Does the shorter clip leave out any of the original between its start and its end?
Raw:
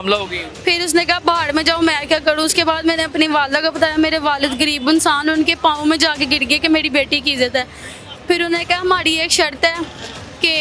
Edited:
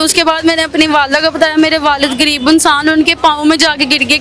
no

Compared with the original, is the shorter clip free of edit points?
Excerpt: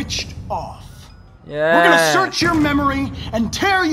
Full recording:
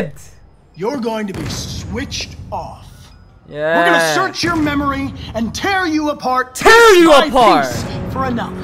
yes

